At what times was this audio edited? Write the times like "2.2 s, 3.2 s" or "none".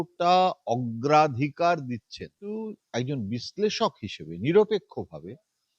2.4 s